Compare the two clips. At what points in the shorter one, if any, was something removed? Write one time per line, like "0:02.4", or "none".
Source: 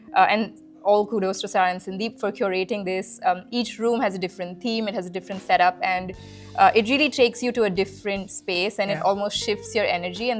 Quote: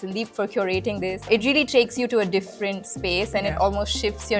0:01.3

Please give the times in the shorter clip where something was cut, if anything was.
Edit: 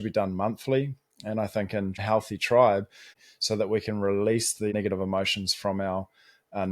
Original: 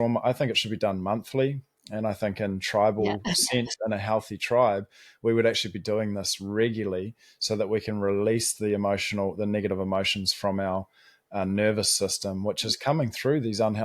0:02.0
0:03.1
0:04.7

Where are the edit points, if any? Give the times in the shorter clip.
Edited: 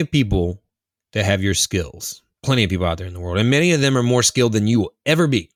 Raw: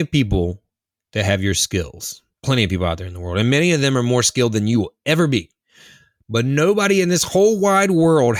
none

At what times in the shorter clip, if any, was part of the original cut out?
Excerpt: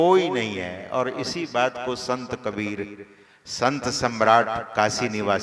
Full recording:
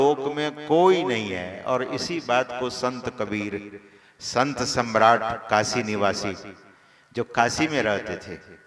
none

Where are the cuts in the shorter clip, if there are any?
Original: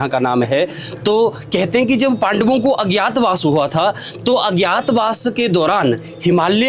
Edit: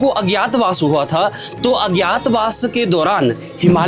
none

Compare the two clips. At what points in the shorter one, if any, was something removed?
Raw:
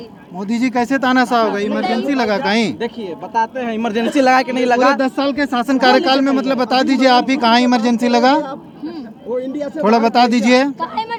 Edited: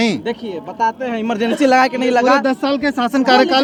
none

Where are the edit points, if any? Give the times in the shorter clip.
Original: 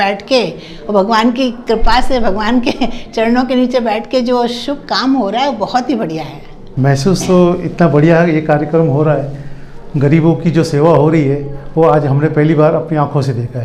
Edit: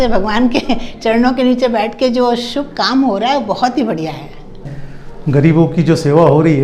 0:04.6

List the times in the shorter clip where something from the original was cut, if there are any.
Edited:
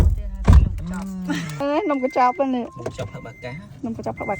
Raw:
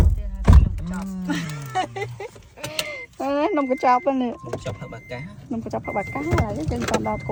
0:01.6

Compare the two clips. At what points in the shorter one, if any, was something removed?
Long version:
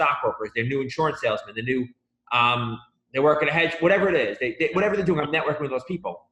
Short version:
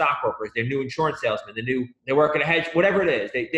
0:02.0

